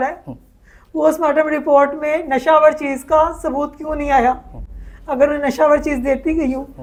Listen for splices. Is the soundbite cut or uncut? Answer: uncut